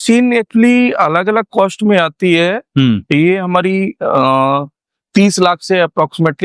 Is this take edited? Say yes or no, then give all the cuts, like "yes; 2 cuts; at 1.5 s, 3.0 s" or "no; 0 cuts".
no; 0 cuts